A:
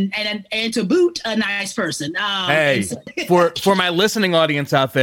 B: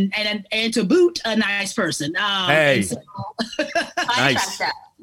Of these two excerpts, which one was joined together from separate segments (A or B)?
A